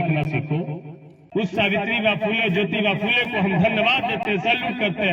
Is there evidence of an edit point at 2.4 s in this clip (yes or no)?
no